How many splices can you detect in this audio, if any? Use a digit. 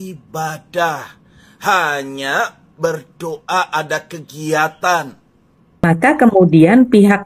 1